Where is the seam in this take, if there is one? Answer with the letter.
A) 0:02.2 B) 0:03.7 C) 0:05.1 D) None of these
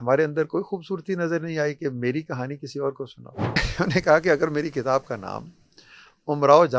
B